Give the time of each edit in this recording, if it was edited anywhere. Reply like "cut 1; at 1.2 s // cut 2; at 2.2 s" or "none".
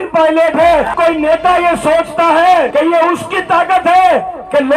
cut 1; at 0.9 s // cut 2; at 2.7 s